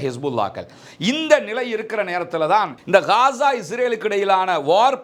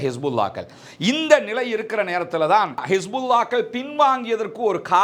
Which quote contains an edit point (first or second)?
second